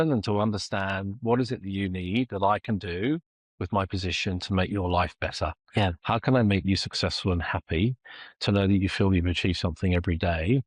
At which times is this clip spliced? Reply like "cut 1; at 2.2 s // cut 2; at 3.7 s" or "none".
none